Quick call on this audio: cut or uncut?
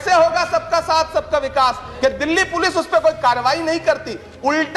cut